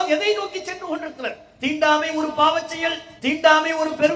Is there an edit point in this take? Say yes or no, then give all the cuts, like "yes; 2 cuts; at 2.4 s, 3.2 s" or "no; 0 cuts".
yes; 1 cut; at 1.4 s